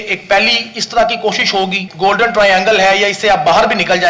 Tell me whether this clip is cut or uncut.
cut